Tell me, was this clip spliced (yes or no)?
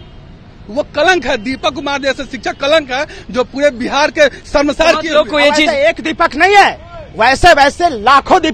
no